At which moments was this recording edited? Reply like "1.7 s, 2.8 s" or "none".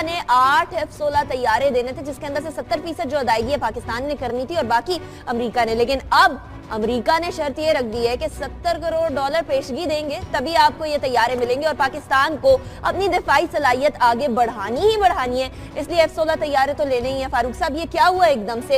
none